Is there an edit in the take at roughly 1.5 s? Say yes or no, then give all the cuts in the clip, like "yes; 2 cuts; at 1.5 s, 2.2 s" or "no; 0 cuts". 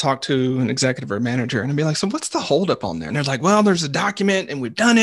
no; 1 cut; at 3.1 s